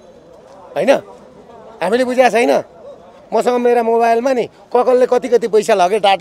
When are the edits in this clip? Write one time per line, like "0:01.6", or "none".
none